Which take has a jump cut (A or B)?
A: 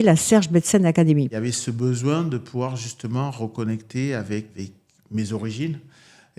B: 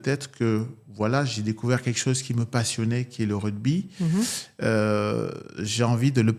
A